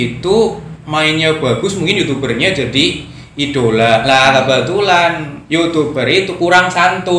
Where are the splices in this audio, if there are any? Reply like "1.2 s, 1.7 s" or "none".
none